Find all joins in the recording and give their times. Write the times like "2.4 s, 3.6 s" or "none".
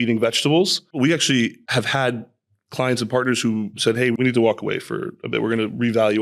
1.0 s, 1.6 s, 4.1 s